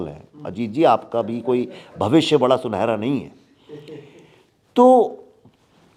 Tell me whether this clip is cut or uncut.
uncut